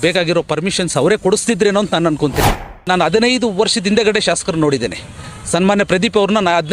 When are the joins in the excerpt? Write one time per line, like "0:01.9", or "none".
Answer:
0:02.8